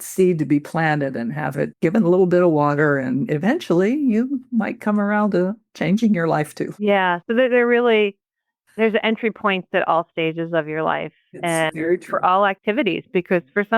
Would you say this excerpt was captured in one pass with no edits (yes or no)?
no